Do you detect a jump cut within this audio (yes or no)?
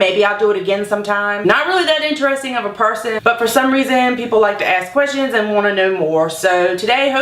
yes